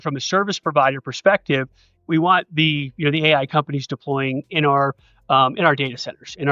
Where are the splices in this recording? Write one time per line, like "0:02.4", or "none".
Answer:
0:02.1
0:04.5

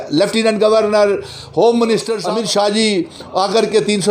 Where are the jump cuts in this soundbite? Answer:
0:02.2

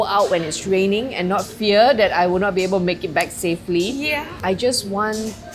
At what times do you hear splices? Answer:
0:04.4

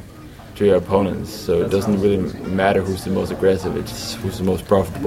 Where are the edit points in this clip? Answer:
none

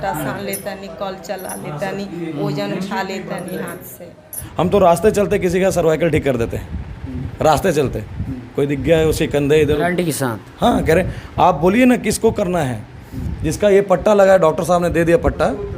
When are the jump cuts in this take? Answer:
0:04.4

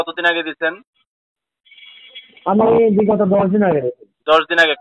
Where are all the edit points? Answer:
none

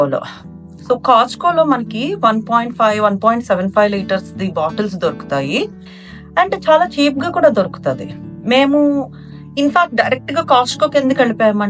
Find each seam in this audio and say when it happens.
none

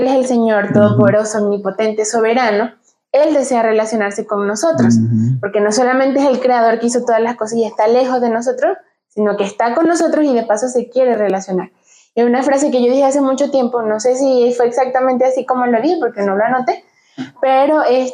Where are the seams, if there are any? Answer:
none

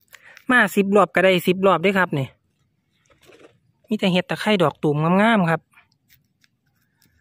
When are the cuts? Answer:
none

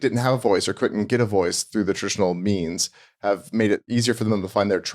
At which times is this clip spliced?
0:03.8

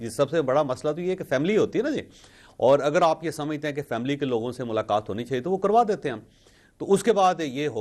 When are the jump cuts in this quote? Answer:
none

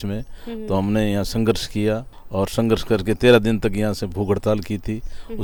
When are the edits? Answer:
none

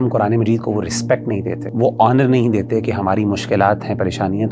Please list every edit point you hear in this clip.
0:01.6

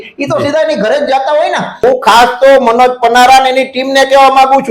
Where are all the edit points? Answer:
0:01.7

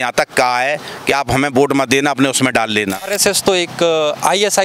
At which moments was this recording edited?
0:03.1

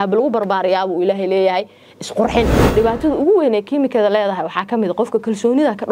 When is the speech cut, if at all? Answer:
0:02.7

